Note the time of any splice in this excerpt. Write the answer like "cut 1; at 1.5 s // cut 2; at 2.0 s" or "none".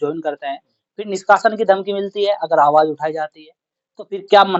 none